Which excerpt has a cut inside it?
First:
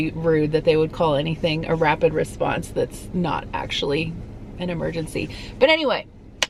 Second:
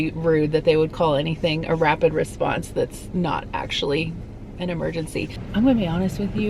second; 1 cut; at 5.4 s

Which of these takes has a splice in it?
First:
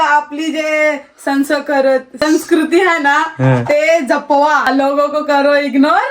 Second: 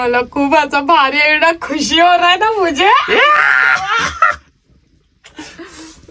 first; 2 cuts; at 2.1 s, 4.7 s

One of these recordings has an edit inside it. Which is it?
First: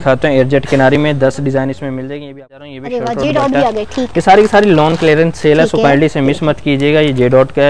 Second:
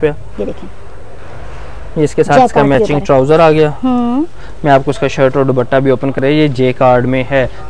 first; 1 cut; at 2.3 s

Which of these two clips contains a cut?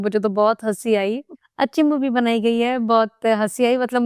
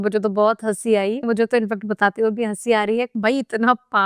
second; 2 cuts; at 1.2 s, 3.2 s

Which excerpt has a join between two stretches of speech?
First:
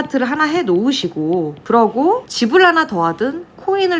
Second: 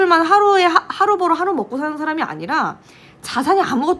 first; 2 cuts; at 1.6 s, 2.3 s

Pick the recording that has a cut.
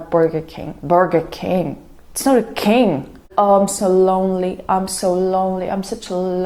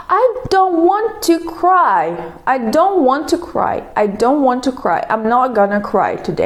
first; 1 cut; at 3.2 s

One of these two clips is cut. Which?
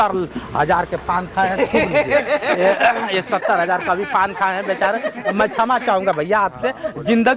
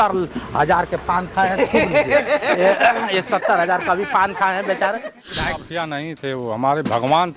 second; 1 cut; at 5.2 s

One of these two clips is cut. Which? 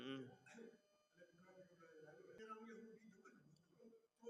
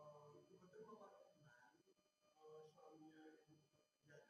first; 1 cut; at 2.4 s

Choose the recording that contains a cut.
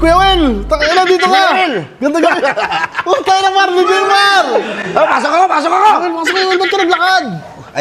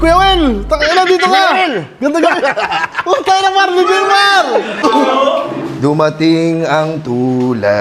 second; 1 cut; at 4.8 s

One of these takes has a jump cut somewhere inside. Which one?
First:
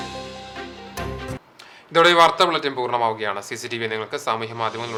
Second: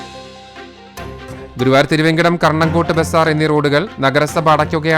second; 1 cut; at 1.3 s

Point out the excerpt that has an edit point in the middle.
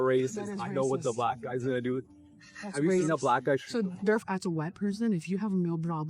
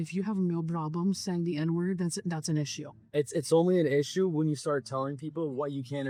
first; 1 cut; at 4.2 s

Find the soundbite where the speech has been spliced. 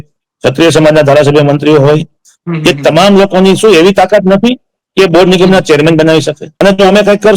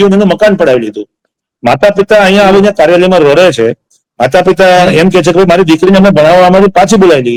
first; 1 cut; at 6.4 s

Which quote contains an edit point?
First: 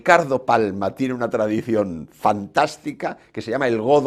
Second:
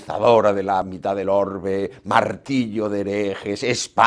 second; 1 cut; at 0.9 s

